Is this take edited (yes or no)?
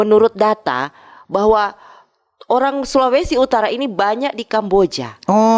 no